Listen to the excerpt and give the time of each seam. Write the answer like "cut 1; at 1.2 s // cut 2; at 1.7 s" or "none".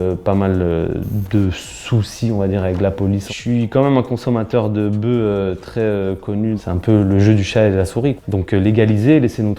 cut 1; at 3.3 s // cut 2; at 6.6 s // cut 3; at 8.2 s